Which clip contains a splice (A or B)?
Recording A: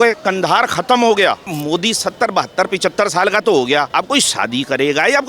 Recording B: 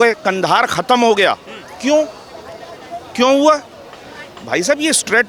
A